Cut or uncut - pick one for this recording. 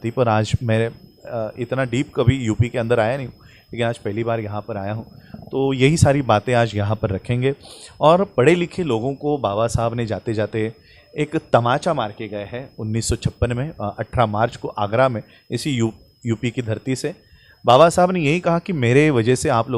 uncut